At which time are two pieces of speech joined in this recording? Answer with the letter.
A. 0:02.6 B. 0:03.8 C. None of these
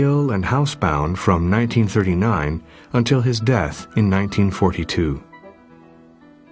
B